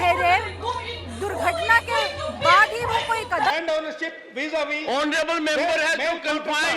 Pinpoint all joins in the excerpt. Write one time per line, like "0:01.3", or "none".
0:03.5